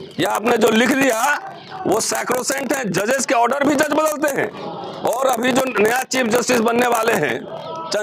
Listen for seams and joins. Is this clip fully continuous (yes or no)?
yes